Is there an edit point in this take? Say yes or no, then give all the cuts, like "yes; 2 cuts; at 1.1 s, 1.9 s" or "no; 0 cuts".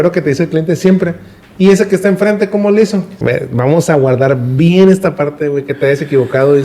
yes; 1 cut; at 3.1 s